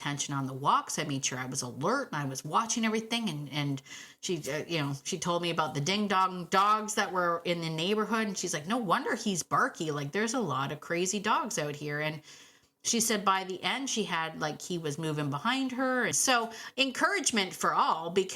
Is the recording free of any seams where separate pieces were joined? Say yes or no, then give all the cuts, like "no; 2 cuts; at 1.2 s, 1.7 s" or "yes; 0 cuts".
no; 1 cut; at 16.2 s